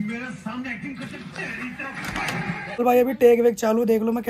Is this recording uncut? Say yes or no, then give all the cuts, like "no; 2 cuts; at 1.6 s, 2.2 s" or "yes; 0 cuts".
no; 1 cut; at 2.8 s